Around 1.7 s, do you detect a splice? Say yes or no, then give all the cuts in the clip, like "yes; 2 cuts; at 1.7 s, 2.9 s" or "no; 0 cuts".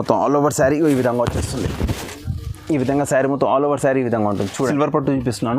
no; 1 cut; at 4.7 s